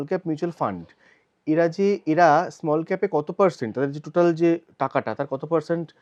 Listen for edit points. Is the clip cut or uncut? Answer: uncut